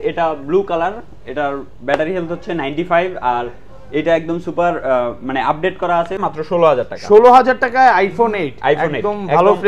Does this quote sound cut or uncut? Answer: cut